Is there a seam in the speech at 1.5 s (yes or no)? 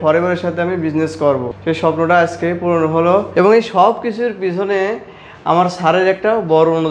yes